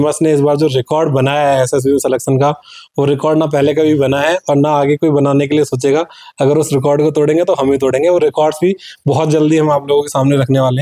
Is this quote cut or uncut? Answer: uncut